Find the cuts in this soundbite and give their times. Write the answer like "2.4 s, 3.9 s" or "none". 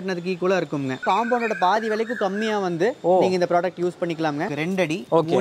1.0 s, 4.5 s